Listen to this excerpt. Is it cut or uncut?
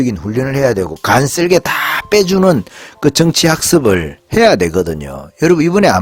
uncut